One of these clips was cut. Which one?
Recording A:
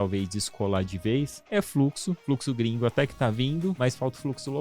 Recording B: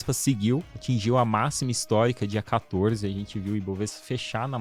A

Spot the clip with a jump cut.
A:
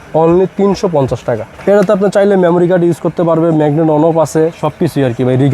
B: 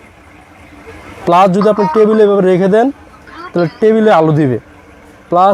A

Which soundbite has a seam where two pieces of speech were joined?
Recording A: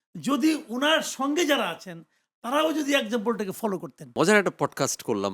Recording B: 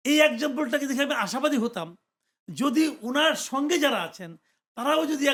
A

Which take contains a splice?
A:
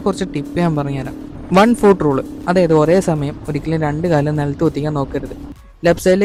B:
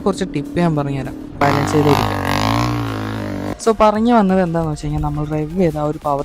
B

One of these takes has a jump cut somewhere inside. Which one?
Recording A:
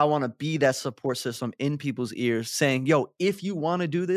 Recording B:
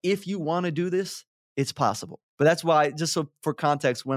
B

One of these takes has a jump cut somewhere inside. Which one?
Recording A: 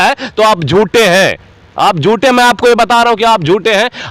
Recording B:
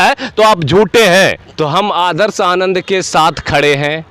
B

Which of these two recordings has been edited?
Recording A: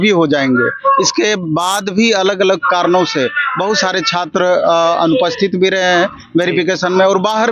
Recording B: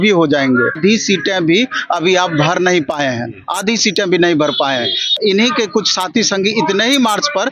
B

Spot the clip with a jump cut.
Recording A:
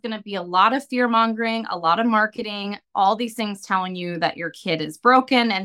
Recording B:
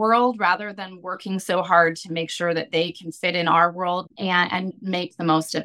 B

